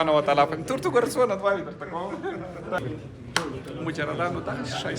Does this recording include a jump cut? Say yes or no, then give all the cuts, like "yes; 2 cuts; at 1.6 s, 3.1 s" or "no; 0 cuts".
yes; 1 cut; at 2.8 s